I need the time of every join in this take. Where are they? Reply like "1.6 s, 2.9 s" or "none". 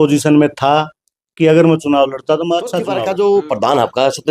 2.9 s